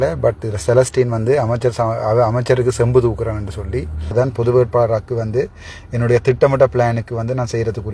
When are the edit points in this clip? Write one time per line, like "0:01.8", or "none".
0:04.1